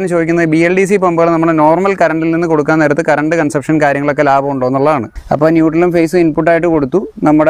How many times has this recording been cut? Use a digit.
1